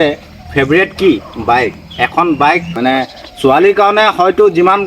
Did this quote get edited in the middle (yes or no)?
yes